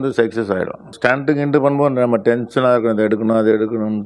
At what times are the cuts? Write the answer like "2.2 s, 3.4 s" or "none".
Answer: 0.9 s